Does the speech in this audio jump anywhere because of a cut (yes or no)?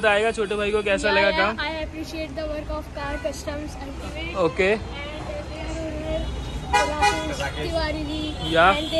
no